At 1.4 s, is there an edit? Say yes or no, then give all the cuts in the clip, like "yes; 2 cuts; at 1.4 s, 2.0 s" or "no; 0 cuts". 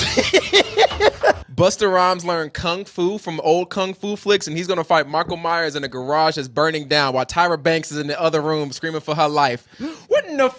yes; 1 cut; at 1.4 s